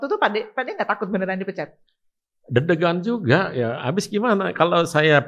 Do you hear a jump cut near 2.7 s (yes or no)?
no